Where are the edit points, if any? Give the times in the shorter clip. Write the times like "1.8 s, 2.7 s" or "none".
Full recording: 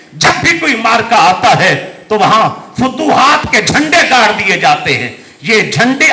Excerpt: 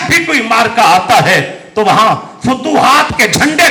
none